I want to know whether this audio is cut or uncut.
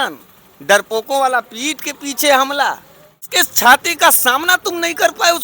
cut